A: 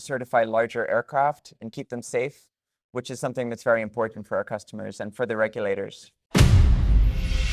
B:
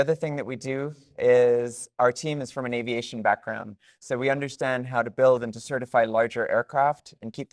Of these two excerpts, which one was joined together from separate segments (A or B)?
A